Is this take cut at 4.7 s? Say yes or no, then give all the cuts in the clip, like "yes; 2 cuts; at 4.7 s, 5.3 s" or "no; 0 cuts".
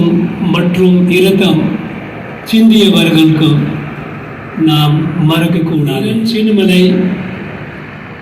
no; 1 cut; at 6.0 s